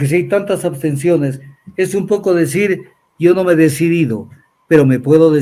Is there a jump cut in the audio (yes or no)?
no